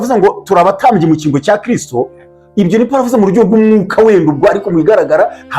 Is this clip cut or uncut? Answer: uncut